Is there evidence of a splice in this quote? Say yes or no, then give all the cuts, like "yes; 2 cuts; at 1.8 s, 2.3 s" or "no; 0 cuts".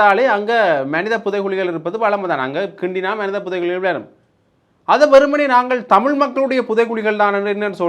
no; 0 cuts